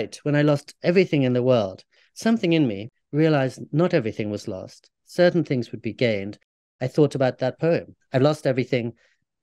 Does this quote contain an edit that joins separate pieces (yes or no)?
yes